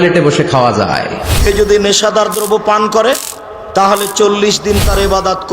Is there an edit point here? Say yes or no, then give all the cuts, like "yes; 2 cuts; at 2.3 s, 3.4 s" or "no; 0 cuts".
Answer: yes; 1 cut; at 1.3 s